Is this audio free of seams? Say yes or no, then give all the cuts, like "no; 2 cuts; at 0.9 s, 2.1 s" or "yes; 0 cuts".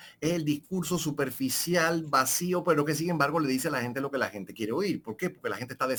yes; 0 cuts